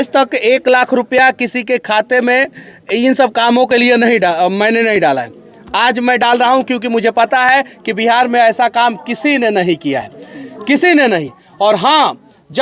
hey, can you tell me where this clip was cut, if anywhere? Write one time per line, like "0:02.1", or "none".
none